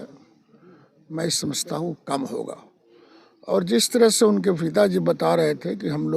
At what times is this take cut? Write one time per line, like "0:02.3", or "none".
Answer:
none

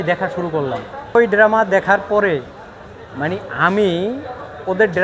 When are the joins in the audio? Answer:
none

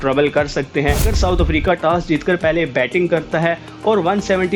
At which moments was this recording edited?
0:01.1

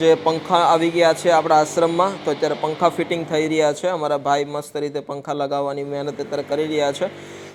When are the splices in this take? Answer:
none

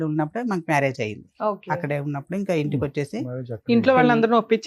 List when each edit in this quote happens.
none

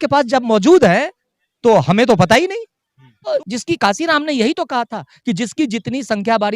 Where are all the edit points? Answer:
0:03.3

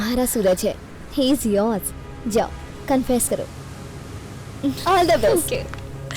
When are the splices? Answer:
none

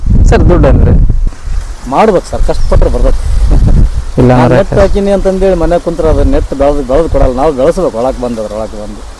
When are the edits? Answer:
0:01.4

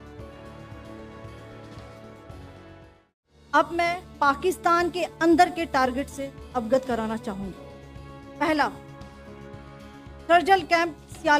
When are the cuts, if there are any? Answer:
0:03.5

